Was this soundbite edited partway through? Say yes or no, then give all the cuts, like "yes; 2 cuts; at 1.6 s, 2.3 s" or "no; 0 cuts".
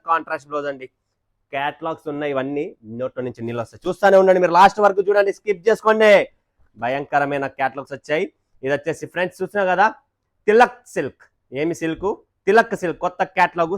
no; 0 cuts